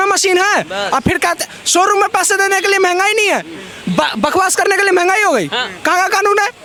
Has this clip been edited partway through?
no; 0 cuts

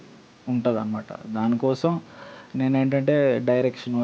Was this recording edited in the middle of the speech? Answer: no; 0 cuts

